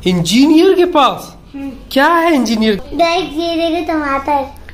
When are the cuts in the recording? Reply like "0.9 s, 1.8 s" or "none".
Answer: 2.8 s